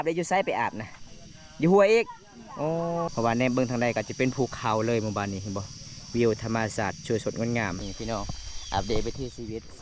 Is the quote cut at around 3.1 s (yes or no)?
yes